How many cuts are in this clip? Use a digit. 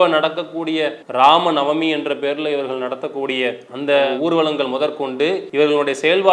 2